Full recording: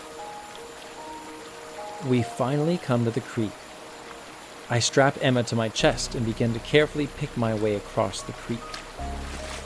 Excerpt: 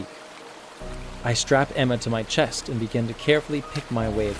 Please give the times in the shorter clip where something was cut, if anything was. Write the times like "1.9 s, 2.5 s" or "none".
none